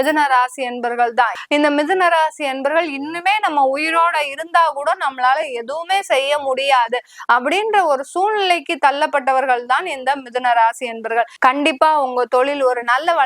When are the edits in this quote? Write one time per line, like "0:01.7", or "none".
0:01.4
0:11.3